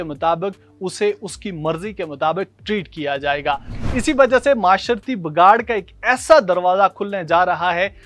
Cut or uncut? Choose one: cut